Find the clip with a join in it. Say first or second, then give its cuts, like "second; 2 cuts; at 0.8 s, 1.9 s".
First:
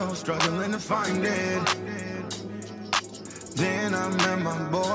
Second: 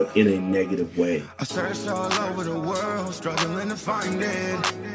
second; 1 cut; at 1.4 s